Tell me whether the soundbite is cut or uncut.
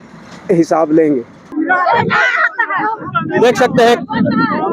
cut